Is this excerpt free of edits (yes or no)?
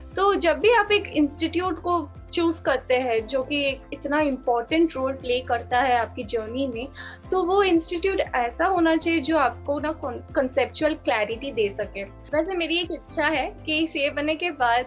no